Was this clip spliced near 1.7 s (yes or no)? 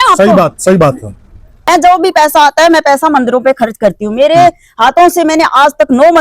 yes